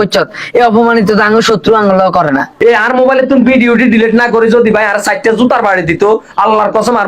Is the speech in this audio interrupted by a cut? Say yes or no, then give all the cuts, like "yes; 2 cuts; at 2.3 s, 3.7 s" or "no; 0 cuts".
yes; 1 cut; at 2.5 s